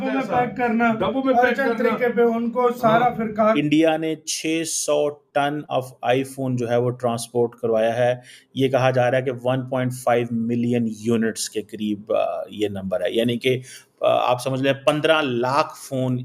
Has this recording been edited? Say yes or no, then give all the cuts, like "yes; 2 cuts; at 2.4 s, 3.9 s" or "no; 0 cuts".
yes; 1 cut; at 3.6 s